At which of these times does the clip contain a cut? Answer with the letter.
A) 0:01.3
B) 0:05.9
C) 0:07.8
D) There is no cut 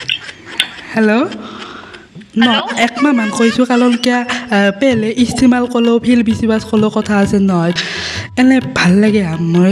C